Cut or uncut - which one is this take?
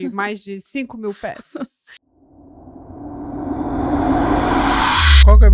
cut